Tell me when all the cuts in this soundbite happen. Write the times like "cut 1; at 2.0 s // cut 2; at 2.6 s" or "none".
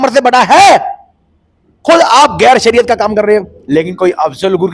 cut 1; at 3.6 s